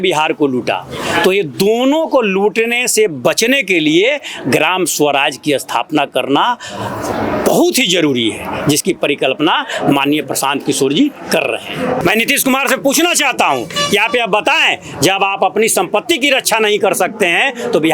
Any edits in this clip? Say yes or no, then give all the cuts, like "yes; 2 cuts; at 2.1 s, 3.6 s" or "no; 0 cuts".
yes; 1 cut; at 12.0 s